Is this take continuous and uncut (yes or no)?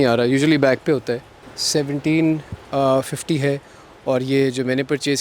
yes